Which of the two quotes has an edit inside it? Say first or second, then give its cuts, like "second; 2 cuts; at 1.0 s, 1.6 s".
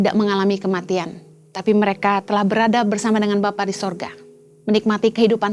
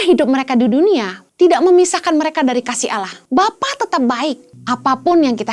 second; 3 cuts; at 1.2 s, 3.1 s, 4.5 s